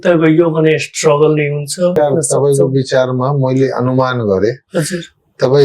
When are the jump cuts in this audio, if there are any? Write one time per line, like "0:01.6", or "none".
0:01.9